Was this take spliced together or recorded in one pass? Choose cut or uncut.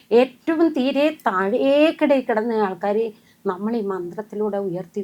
uncut